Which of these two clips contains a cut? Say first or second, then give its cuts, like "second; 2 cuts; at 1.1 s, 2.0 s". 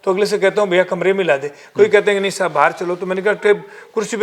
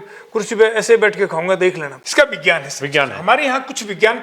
second; 1 cut; at 1.9 s